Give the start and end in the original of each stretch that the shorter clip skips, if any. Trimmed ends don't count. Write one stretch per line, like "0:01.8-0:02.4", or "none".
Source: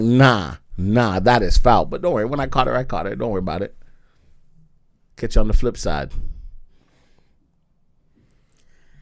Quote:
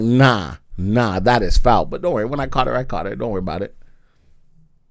none